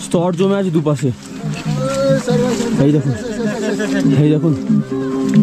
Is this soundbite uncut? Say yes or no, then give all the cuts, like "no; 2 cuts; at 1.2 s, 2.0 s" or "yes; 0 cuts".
yes; 0 cuts